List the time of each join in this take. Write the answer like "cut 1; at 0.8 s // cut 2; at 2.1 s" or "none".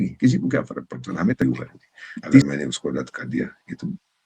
cut 1; at 2.4 s